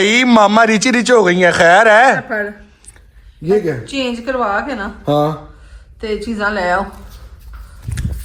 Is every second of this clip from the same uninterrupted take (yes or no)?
yes